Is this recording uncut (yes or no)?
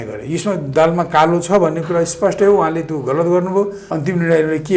no